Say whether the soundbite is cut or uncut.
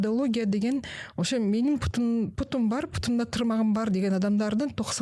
uncut